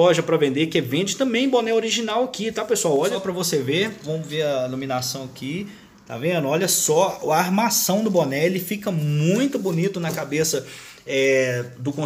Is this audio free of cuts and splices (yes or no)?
no